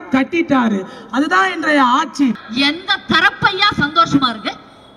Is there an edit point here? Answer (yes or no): yes